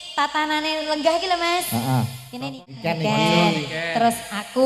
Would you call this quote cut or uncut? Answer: cut